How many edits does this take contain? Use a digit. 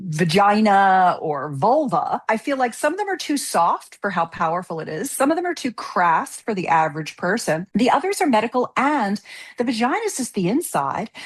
2